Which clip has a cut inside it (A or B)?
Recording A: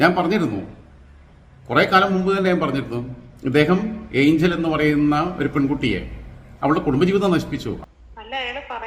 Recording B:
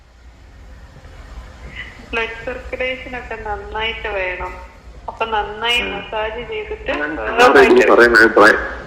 A